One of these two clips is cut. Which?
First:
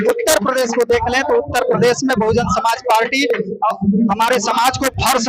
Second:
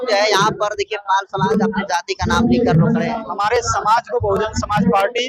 second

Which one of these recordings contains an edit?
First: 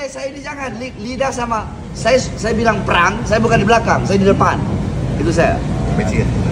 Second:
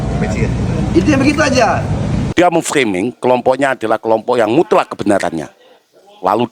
second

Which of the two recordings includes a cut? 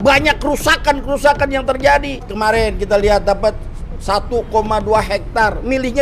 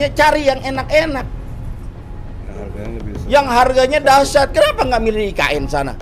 first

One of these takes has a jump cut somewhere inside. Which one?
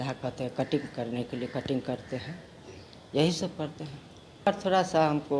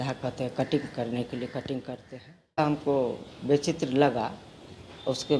second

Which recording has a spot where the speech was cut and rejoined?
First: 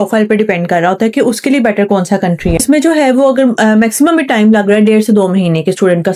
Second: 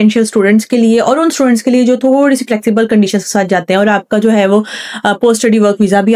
first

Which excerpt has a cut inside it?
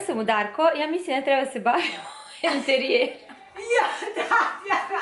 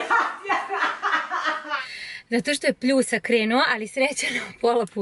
second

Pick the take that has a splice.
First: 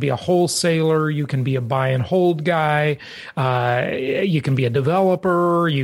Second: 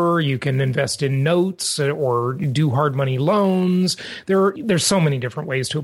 second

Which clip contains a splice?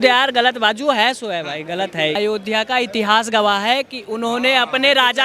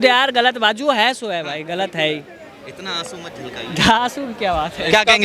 first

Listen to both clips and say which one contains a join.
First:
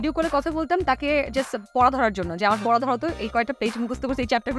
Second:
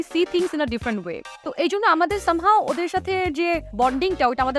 second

